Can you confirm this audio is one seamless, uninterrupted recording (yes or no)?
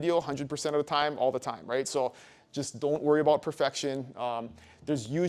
yes